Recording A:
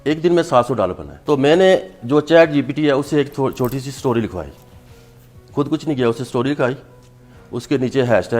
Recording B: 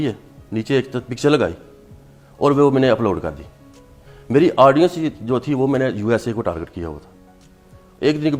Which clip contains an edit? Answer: A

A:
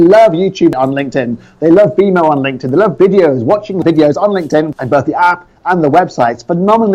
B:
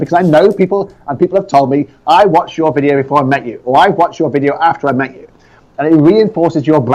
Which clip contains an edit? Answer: A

